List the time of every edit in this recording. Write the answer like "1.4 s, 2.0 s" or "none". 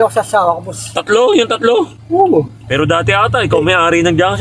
2.6 s